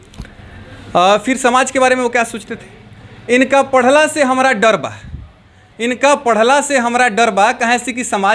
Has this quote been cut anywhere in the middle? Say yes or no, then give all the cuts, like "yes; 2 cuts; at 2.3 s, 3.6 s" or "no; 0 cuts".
no; 0 cuts